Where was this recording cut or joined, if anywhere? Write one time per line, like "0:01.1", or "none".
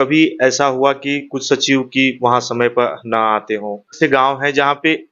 0:04.0